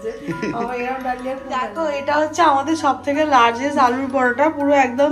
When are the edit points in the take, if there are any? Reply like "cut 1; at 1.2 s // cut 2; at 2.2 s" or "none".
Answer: cut 1; at 1.4 s